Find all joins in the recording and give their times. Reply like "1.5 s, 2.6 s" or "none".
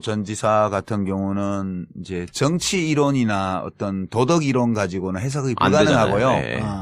none